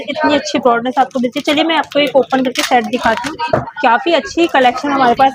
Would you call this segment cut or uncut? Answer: uncut